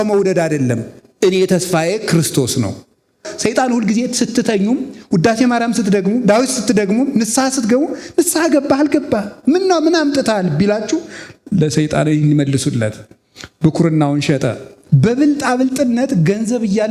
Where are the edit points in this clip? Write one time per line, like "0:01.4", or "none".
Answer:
0:03.3
0:14.7